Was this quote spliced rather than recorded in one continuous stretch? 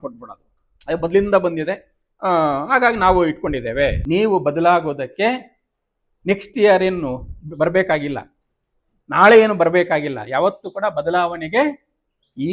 yes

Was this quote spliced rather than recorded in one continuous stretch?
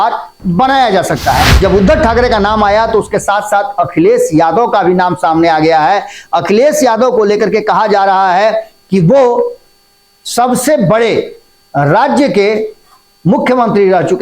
yes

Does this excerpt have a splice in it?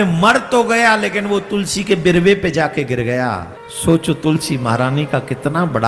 yes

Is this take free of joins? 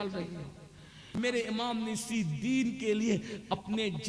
no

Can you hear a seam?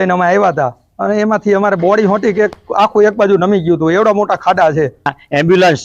yes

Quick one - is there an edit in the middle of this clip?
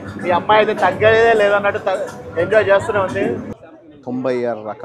yes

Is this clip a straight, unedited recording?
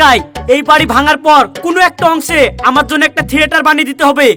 yes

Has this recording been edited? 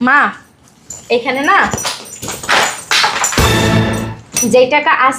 yes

